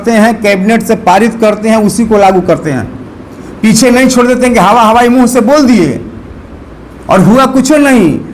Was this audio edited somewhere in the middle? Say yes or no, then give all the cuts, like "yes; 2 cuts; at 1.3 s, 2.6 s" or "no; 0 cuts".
no; 0 cuts